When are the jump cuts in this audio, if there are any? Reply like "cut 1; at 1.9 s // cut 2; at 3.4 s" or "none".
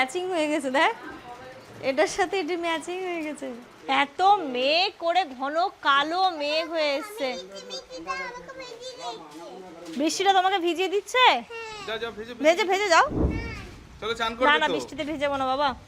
none

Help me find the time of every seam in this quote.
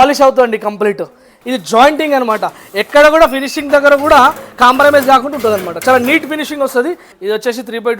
cut 1; at 1.4 s // cut 2; at 7.1 s

